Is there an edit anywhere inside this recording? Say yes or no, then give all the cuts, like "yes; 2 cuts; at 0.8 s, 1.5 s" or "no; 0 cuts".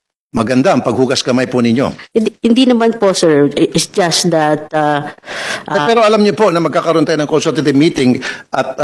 no; 0 cuts